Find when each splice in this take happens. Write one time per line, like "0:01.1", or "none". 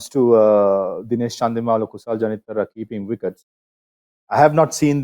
none